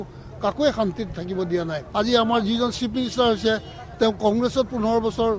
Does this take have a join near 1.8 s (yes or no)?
yes